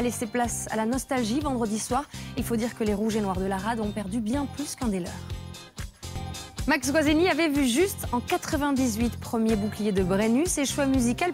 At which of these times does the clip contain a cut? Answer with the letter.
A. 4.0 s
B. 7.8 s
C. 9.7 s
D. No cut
B